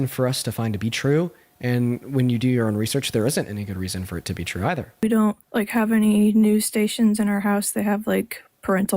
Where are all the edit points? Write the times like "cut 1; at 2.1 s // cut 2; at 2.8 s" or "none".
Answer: cut 1; at 5.0 s